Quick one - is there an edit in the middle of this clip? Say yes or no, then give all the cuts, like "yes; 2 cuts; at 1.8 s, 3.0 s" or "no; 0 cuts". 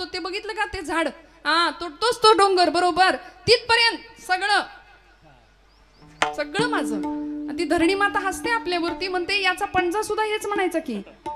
no; 0 cuts